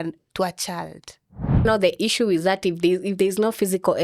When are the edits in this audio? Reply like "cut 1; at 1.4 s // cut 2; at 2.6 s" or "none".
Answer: cut 1; at 1.6 s